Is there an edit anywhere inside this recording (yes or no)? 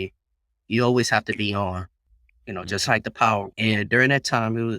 yes